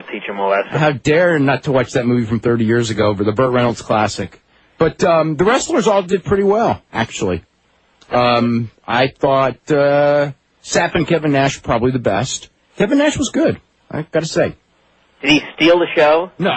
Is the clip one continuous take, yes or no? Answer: yes